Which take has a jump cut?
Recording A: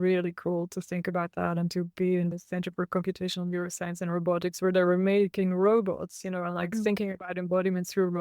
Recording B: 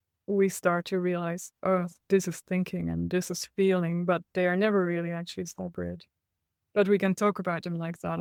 A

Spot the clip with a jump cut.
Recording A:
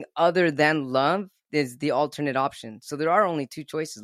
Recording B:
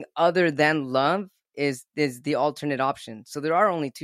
A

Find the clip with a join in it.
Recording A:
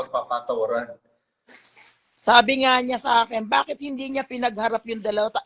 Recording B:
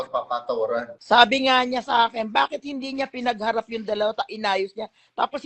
B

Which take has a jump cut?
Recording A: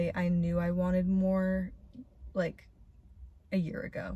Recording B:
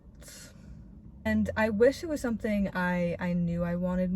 B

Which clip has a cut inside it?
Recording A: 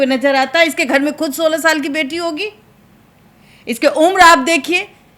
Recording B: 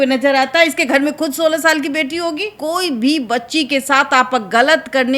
B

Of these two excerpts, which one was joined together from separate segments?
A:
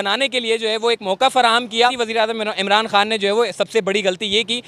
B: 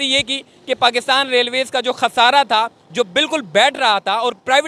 A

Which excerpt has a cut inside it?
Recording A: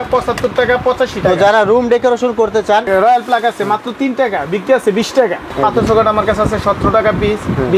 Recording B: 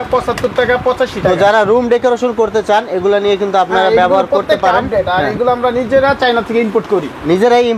A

